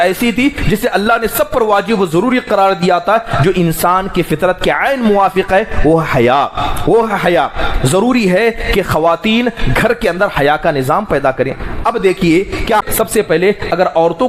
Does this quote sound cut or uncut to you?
cut